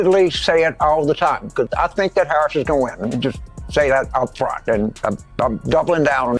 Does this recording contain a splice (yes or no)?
no